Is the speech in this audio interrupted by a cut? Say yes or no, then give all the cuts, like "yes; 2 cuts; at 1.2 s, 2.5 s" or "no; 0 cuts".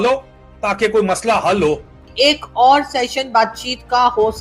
yes; 1 cut; at 2.0 s